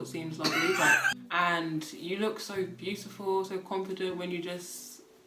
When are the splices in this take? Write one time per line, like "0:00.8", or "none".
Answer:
0:01.1